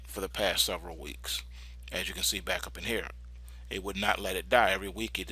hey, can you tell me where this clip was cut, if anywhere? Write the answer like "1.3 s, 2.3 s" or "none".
4.0 s